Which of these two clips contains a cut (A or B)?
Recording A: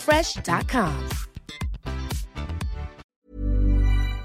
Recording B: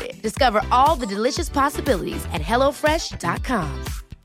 A